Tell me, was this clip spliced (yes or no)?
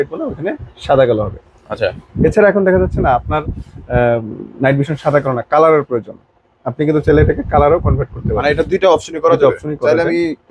no